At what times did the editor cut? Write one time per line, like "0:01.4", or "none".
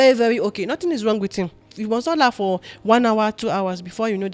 0:01.7